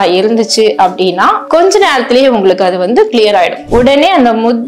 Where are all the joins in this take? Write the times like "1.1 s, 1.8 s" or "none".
3.6 s